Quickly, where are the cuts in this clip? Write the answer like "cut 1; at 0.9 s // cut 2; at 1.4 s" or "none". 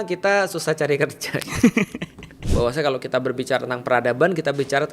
cut 1; at 2.4 s